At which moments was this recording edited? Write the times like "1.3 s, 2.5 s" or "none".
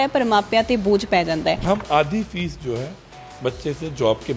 1.6 s